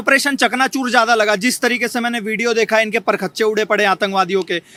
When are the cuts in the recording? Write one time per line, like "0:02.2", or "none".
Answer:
none